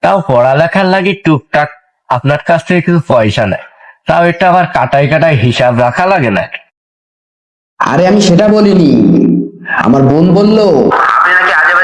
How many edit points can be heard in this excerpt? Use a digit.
0